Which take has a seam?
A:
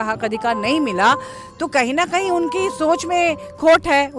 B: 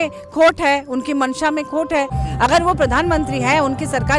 B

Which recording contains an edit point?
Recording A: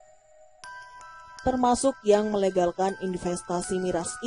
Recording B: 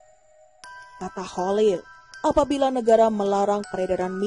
B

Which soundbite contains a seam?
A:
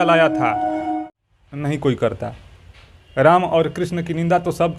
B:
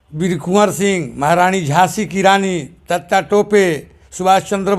A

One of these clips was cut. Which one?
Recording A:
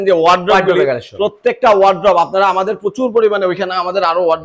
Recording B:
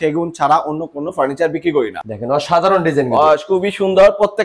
B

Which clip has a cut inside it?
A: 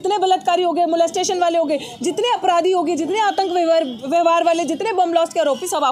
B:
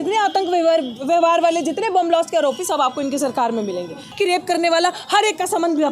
B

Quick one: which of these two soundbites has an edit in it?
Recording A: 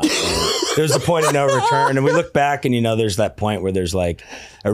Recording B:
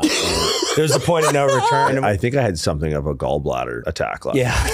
B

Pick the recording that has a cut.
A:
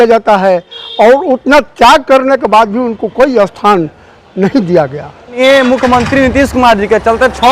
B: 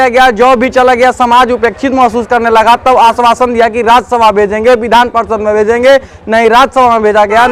A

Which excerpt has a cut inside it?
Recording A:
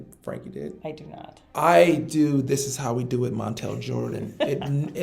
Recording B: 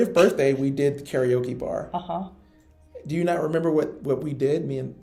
A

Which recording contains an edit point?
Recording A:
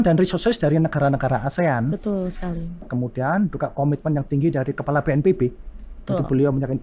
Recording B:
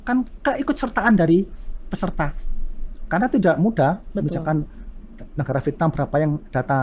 A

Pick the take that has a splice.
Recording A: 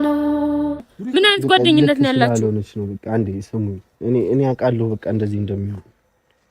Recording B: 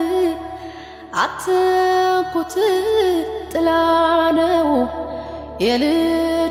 A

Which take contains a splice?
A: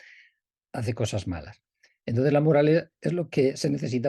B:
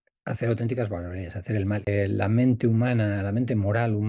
B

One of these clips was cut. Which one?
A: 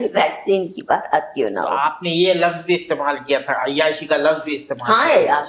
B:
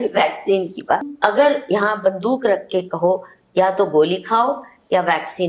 B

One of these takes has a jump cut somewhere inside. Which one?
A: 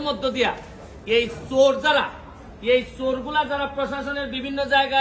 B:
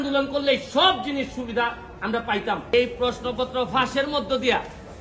B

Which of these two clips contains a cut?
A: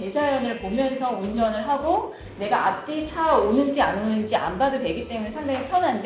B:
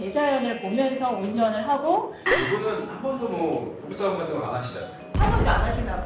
B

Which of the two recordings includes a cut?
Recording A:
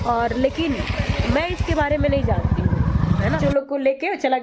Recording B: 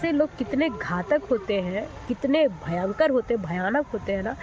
A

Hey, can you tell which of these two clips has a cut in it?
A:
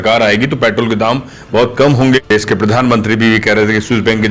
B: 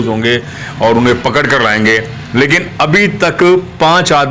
A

